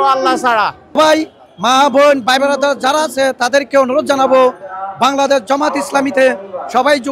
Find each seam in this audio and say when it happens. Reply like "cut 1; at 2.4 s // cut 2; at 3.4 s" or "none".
cut 1; at 0.9 s